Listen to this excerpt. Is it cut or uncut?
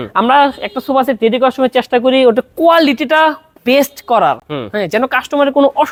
uncut